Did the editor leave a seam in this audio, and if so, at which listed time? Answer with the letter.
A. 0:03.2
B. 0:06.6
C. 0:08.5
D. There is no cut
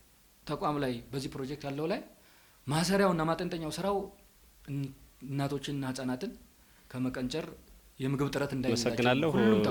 D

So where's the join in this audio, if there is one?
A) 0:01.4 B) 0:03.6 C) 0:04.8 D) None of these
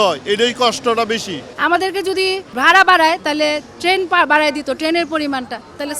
A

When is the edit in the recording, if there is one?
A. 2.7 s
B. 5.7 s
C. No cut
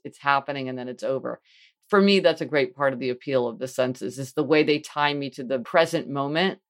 B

